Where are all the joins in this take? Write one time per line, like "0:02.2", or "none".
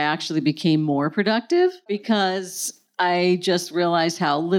0:01.8

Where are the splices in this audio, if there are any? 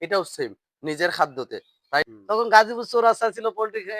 0:02.1

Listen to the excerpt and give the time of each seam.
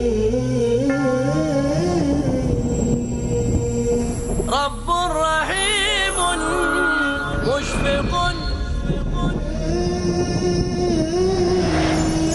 0:10.4

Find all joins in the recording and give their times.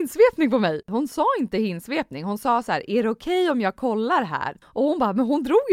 0:00.9
0:04.6

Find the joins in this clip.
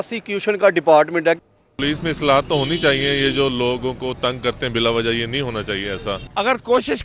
0:01.4
0:06.2

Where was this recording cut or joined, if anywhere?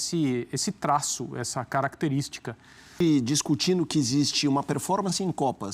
0:02.9

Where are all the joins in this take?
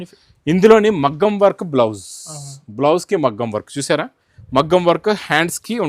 none

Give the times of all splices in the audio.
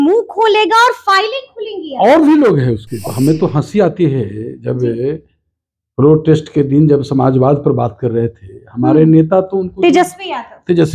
0:03.1

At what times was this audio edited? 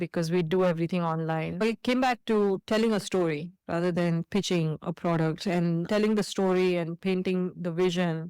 0:01.6
0:05.8

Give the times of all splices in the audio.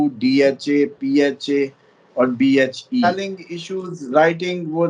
0:03.0

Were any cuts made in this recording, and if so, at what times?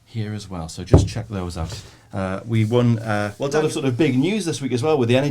0:03.4

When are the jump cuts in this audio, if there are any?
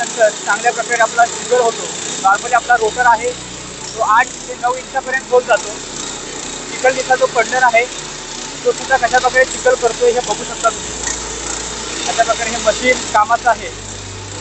none

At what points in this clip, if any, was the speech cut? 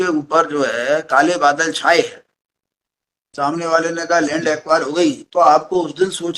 none

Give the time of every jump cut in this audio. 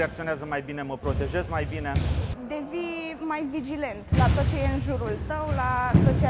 0:02.3

